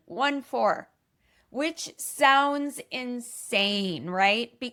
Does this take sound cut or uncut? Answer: uncut